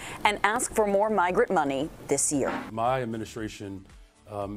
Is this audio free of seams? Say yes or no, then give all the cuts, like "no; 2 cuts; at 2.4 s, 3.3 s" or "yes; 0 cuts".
no; 1 cut; at 2.6 s